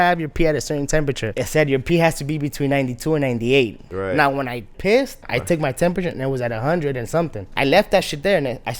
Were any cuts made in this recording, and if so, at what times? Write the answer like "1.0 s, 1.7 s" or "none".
1.3 s, 3.8 s, 5.2 s, 7.5 s